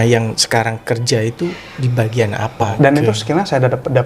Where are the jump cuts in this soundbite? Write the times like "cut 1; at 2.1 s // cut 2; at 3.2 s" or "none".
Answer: cut 1; at 2.7 s